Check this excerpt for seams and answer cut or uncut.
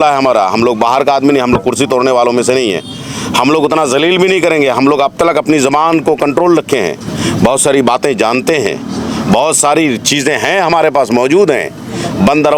uncut